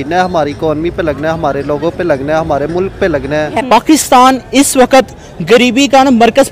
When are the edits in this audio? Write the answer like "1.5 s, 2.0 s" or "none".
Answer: 3.6 s